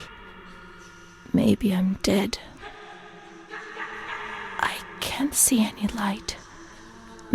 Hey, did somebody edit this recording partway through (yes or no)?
no